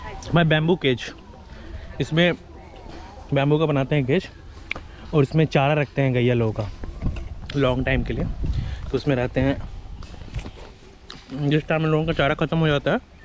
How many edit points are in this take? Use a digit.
0